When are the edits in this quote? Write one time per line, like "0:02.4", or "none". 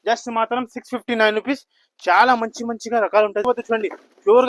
0:03.5